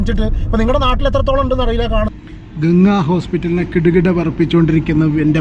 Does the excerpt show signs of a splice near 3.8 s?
no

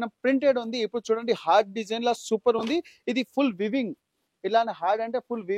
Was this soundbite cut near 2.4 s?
no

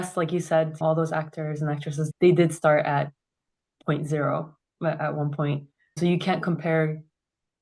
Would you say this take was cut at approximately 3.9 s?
no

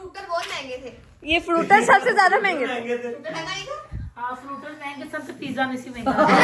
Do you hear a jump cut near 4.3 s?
no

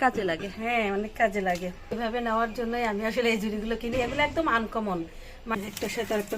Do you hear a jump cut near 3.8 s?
no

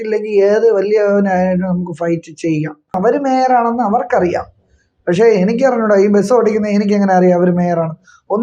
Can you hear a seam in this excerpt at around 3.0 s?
yes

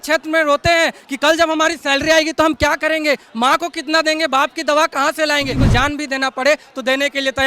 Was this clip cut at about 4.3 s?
no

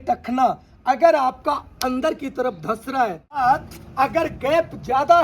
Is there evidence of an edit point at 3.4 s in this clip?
yes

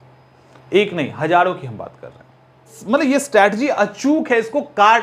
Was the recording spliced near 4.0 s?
no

